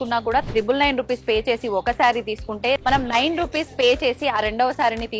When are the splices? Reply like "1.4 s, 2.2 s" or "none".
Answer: 2.8 s